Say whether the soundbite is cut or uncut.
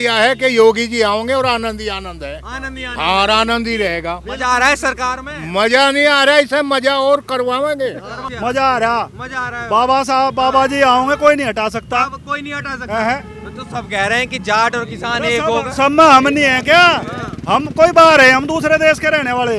cut